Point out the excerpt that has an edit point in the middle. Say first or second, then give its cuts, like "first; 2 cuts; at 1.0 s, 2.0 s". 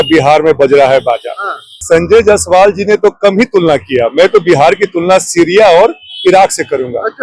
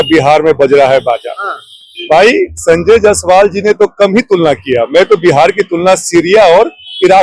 first; 1 cut; at 1.8 s